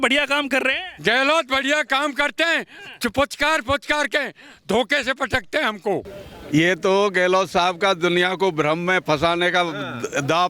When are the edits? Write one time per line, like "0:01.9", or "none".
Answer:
0:06.2